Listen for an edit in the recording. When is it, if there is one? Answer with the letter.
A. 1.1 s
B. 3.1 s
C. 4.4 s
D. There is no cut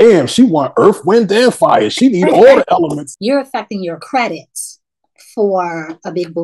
B